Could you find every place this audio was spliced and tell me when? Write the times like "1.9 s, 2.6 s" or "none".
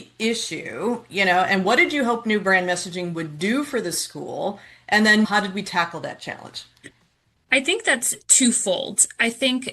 5.3 s